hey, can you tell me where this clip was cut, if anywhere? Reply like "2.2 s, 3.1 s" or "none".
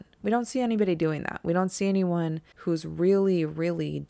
2.5 s